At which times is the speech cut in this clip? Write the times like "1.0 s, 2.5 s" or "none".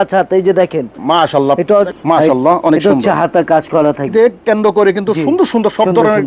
1.9 s, 4.1 s